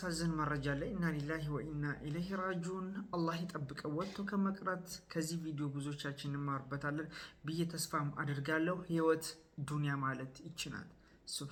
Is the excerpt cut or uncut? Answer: uncut